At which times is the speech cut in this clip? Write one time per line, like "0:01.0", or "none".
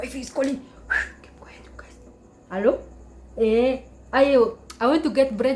none